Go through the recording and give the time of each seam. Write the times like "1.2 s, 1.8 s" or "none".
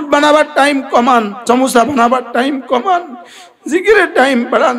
none